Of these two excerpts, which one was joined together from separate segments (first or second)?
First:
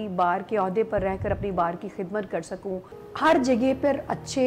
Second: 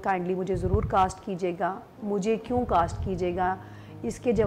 first